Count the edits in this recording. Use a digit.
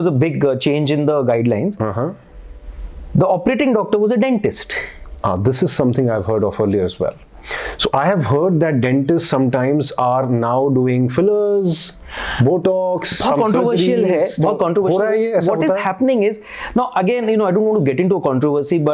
0